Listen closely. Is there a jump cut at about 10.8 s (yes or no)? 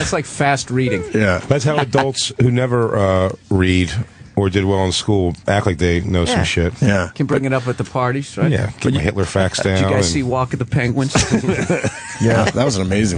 yes